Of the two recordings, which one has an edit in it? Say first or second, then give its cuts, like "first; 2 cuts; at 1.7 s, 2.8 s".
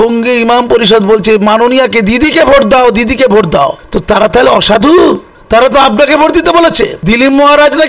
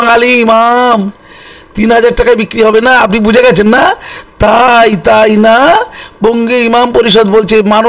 first; 3 cuts; at 3.9 s, 5.3 s, 7.0 s